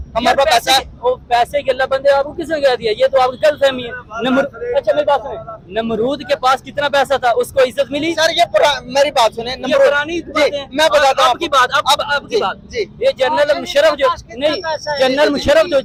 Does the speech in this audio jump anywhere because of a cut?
no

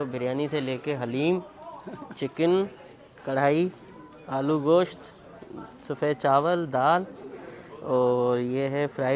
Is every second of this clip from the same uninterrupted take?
yes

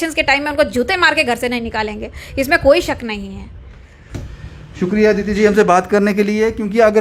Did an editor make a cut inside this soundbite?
no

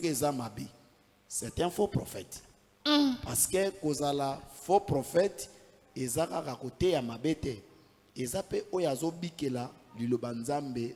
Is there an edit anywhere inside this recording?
no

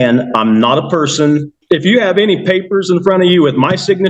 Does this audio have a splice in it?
yes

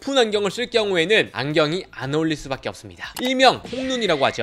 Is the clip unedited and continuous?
yes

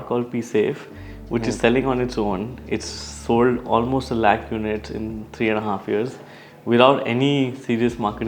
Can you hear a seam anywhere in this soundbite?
no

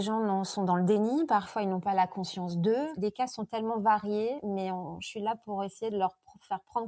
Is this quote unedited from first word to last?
no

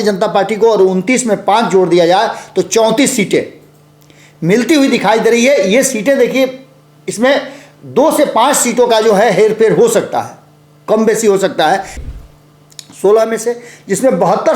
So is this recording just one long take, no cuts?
no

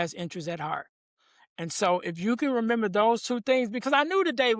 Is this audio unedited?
yes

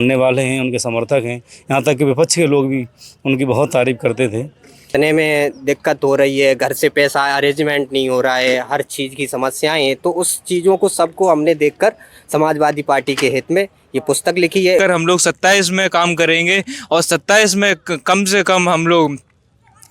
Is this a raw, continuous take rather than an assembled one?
no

